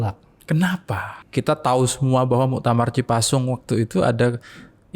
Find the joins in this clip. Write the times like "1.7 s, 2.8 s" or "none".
1.2 s

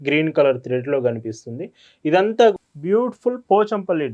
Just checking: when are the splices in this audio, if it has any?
2.5 s

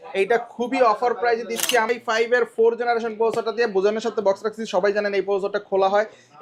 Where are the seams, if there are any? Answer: 1.9 s

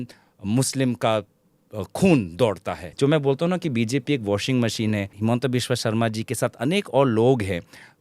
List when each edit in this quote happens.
2.9 s, 5.1 s

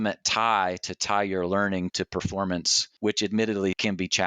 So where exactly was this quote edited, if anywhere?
1.9 s, 2.8 s

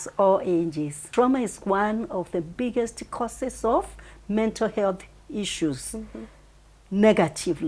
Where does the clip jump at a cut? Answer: 0.9 s

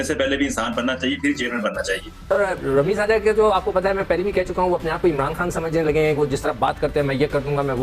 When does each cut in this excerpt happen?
2.1 s

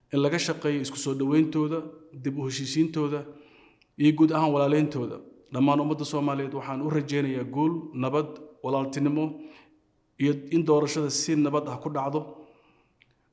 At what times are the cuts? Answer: none

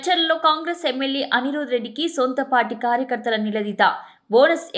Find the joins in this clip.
none

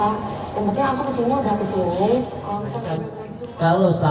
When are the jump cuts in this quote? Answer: 3.1 s

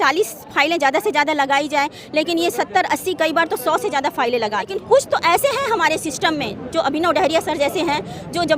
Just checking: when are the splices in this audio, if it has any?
4.8 s

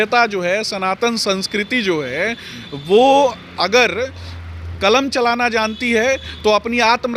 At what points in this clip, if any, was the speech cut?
none

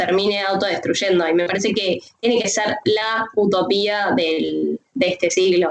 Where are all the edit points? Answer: none

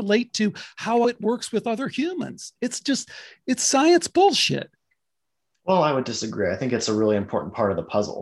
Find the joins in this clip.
1.0 s

